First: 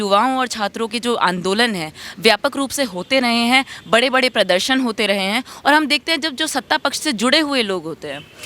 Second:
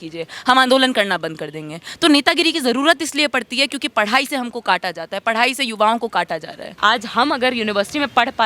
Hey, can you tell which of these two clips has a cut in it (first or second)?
second